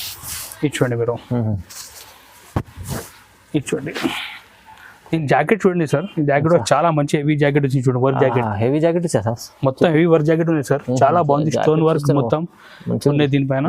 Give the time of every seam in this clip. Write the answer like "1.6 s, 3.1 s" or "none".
none